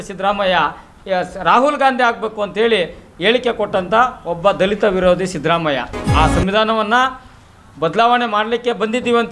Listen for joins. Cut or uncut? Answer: cut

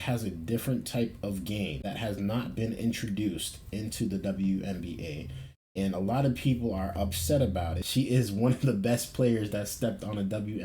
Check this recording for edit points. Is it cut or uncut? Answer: cut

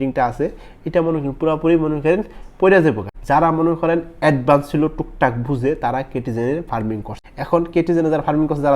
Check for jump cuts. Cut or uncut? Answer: cut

